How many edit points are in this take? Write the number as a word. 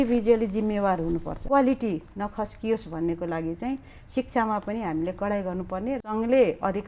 two